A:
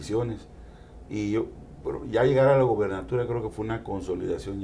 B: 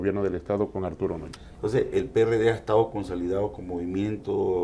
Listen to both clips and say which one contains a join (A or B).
B